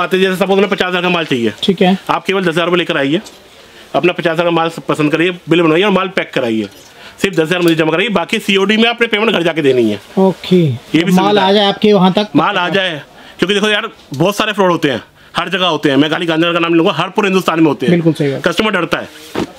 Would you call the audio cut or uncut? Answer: uncut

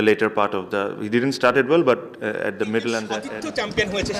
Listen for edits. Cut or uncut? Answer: cut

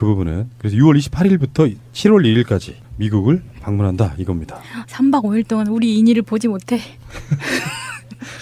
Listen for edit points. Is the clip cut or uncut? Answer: cut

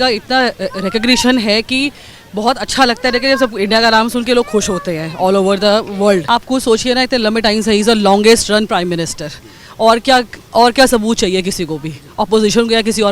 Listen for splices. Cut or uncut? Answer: cut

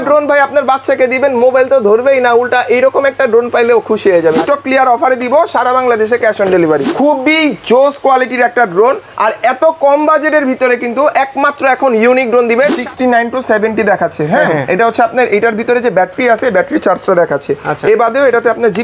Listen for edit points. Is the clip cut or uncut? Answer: cut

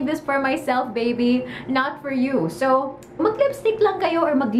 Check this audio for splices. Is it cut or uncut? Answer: cut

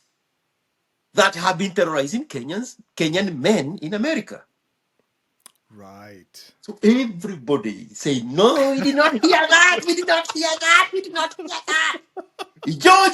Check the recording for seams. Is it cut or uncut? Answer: uncut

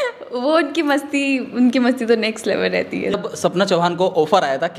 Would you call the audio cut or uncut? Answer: cut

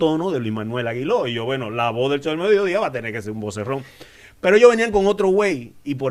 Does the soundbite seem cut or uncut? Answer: uncut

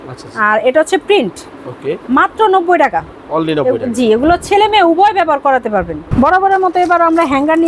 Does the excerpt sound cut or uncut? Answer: cut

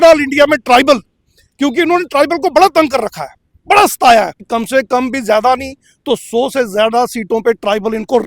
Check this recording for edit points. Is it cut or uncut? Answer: cut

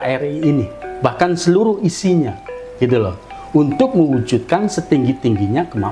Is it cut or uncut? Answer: uncut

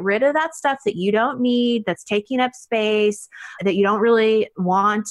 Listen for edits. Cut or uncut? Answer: cut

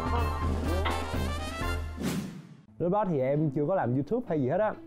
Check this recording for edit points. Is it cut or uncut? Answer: cut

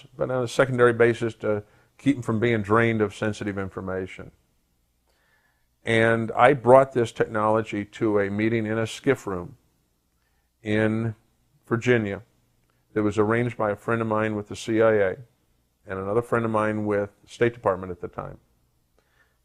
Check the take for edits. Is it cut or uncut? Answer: uncut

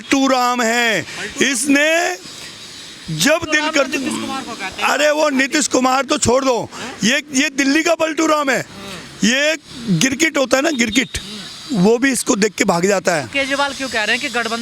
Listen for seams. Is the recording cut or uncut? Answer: uncut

